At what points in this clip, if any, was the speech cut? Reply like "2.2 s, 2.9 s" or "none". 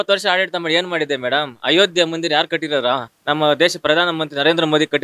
3.1 s